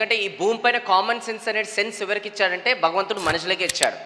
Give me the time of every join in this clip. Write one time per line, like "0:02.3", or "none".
none